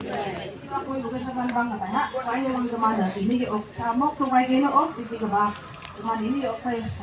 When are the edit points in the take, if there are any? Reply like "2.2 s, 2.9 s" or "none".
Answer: none